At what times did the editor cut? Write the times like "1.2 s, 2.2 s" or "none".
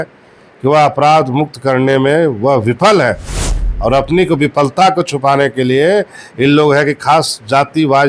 none